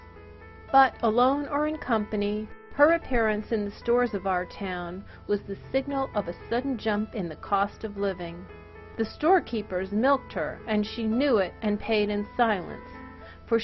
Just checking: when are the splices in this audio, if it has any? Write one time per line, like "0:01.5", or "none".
0:02.5